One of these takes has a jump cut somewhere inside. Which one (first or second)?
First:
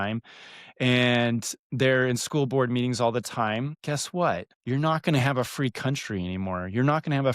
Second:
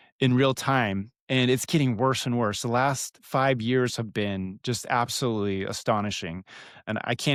first